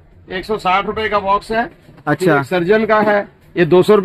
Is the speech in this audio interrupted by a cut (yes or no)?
no